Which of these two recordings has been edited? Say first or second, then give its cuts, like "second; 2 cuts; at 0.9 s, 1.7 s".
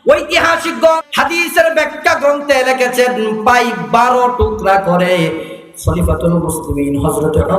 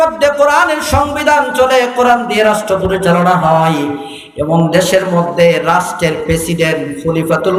first; 1 cut; at 1.0 s